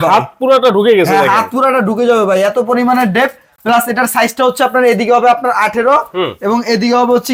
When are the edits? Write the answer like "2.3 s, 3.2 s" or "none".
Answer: none